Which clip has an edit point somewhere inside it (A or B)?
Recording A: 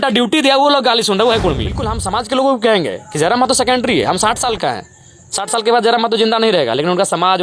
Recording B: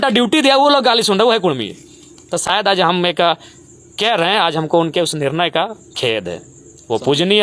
A